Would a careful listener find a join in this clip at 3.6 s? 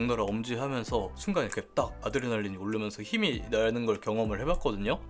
no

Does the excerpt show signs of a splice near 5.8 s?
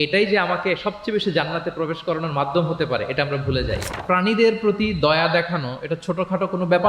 no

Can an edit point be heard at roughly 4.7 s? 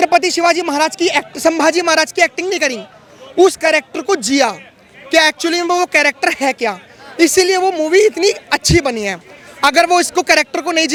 no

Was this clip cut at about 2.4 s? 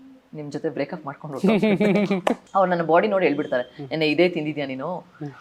yes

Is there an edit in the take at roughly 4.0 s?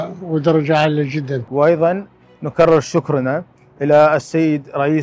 no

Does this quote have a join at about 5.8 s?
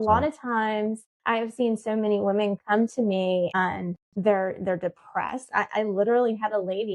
no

